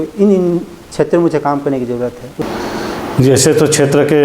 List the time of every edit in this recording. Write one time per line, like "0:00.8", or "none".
0:02.2